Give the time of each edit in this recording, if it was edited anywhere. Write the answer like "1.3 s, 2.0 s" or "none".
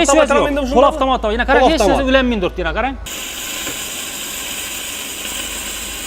3.1 s